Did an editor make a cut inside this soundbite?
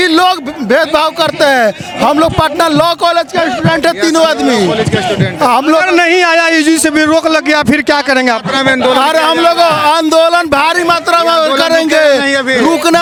no; 0 cuts

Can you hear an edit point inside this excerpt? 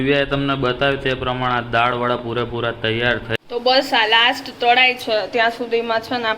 yes; 1 cut; at 3.3 s

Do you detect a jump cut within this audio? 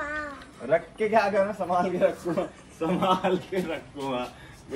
no; 0 cuts

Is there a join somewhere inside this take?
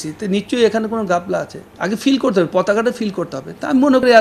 yes; 1 cut; at 1.6 s

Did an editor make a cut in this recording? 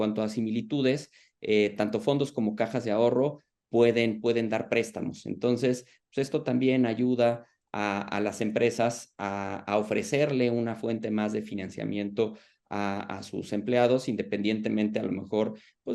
no; 0 cuts

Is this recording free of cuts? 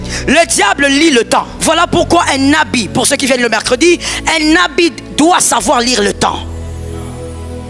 no; 1 cut; at 1.5 s

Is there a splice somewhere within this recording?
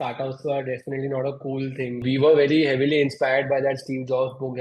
yes; 1 cut; at 2.0 s

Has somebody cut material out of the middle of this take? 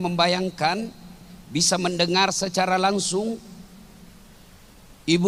no; 0 cuts

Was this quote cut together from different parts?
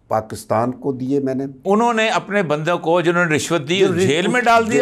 yes; 1 cut; at 1.6 s

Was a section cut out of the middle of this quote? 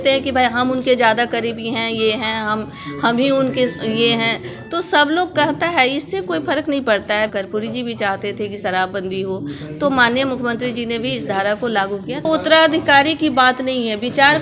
yes; 2 cuts; at 7.3 s, 12.2 s

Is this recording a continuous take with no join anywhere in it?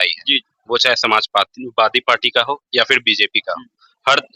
yes; 0 cuts

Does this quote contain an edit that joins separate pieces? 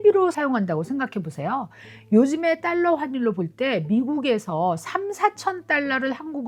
no; 0 cuts

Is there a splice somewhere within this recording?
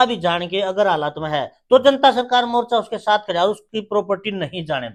no; 0 cuts

